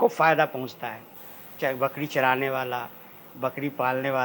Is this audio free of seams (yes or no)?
yes